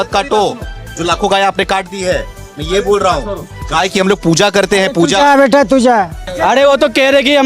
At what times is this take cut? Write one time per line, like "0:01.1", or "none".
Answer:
0:06.2